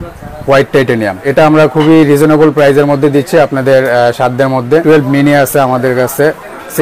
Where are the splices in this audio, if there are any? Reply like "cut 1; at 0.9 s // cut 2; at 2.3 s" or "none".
cut 1; at 1.3 s // cut 2; at 4.8 s